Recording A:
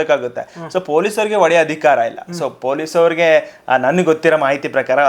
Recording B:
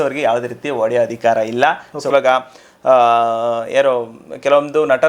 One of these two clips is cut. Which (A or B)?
B